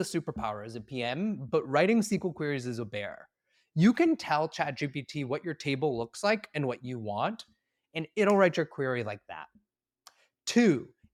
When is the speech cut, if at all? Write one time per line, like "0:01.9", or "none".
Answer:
none